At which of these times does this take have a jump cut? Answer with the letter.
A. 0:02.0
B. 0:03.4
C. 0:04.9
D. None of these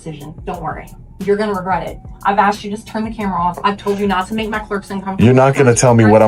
D